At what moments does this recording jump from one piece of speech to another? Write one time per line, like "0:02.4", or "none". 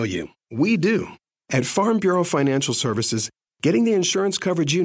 0:01.2